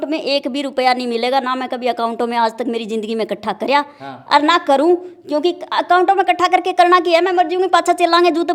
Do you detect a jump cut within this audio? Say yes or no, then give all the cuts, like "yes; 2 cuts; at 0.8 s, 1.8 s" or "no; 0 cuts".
no; 0 cuts